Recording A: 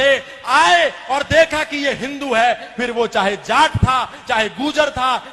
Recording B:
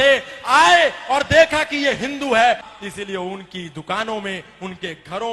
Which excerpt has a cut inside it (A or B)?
B